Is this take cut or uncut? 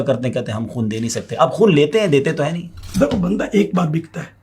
cut